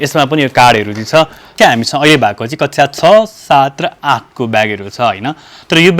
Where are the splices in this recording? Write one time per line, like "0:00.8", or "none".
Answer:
0:01.5